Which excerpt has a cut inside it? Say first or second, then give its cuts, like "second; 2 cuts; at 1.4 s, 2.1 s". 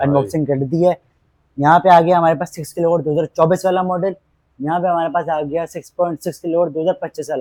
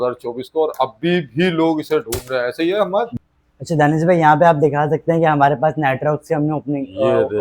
second; 1 cut; at 3.1 s